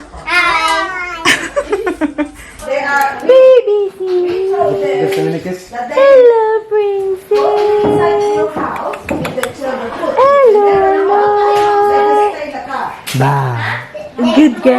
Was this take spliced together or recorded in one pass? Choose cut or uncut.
cut